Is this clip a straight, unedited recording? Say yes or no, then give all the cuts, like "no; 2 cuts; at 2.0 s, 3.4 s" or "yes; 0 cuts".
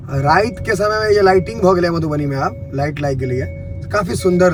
yes; 0 cuts